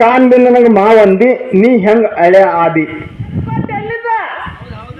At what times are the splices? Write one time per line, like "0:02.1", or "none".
0:03.8